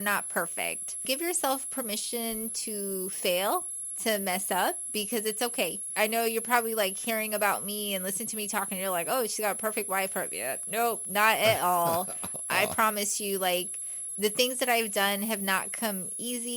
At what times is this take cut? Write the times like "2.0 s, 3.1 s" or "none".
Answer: 1.1 s, 5.9 s